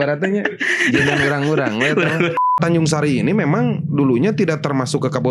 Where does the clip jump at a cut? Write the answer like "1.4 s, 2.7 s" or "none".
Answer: 2.6 s